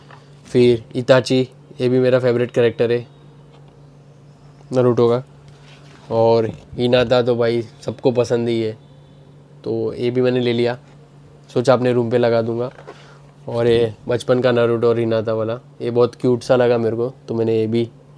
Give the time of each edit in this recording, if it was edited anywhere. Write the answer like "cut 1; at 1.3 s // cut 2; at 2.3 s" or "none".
none